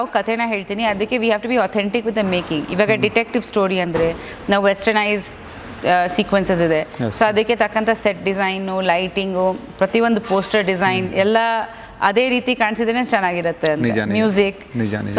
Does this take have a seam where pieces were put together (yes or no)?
no